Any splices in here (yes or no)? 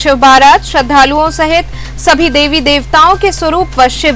no